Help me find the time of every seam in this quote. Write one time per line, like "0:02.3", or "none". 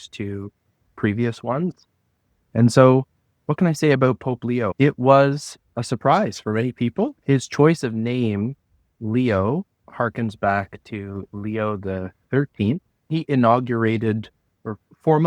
0:01.7
0:07.2
0:13.1